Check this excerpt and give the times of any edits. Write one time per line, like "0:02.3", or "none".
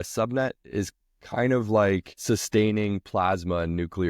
0:02.1